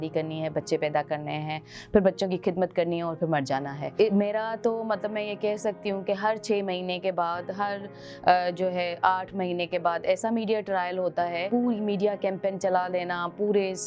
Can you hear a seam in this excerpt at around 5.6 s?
no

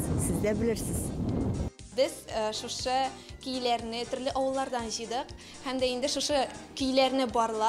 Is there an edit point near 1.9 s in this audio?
yes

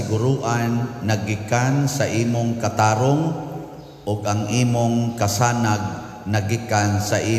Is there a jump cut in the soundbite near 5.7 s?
no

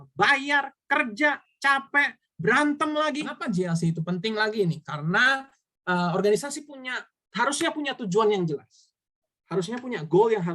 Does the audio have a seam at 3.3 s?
yes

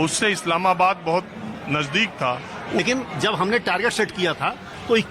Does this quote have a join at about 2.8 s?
yes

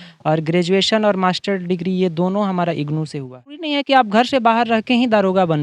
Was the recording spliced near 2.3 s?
no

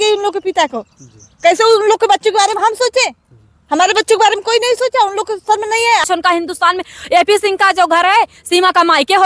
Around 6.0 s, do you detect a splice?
yes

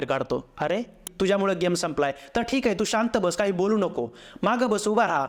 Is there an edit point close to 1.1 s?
yes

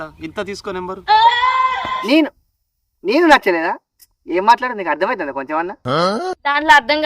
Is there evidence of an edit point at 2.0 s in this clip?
yes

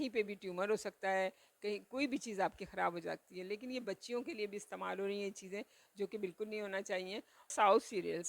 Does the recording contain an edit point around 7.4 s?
yes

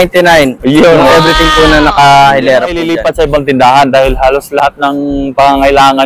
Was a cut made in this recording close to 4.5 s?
no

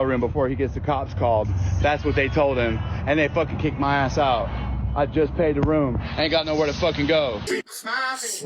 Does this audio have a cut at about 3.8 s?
no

